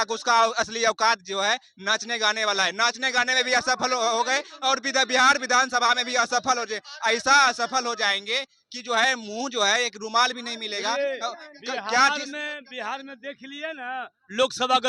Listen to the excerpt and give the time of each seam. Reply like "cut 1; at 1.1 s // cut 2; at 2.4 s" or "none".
none